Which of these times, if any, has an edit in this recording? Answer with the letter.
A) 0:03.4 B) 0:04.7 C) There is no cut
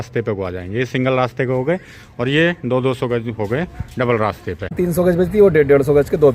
B